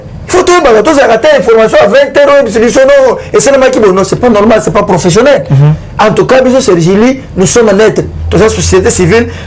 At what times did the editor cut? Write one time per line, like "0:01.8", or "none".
none